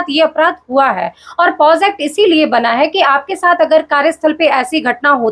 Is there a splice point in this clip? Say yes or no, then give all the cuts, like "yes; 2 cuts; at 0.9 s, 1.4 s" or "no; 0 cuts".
no; 0 cuts